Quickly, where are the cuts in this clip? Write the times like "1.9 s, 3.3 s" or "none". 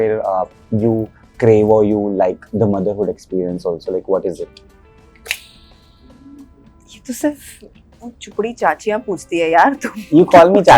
none